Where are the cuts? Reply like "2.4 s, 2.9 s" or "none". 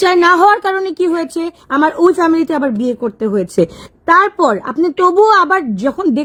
none